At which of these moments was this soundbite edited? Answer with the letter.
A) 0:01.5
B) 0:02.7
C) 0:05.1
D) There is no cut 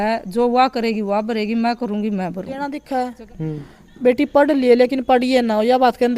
B